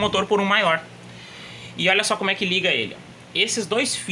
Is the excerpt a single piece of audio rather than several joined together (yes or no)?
yes